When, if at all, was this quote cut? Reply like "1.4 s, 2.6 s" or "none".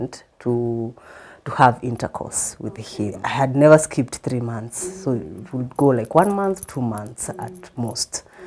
3.2 s

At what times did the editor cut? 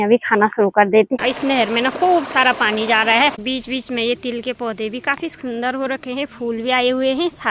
1.1 s, 3.4 s

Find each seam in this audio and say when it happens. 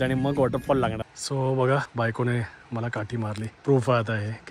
1.1 s, 1.9 s, 3.5 s

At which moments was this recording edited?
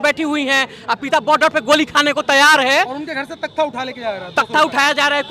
none

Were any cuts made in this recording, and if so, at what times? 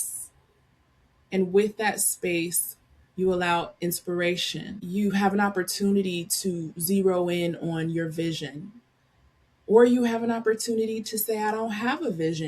4.8 s

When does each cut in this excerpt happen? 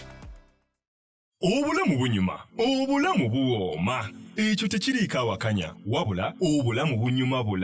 0.9 s

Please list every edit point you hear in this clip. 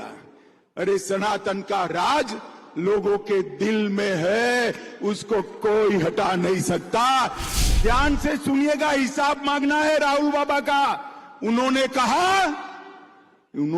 7.5 s

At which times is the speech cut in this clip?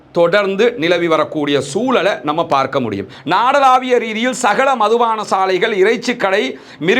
3.1 s

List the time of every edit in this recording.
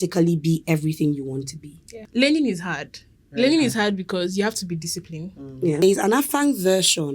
2.0 s, 5.8 s

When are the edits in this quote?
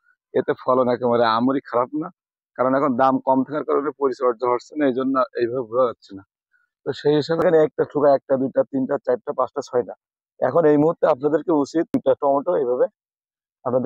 7.4 s, 11.9 s

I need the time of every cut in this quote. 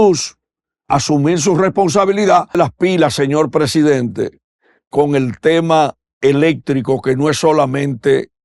2.6 s

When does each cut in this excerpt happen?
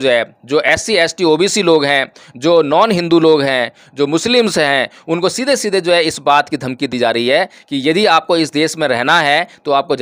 none

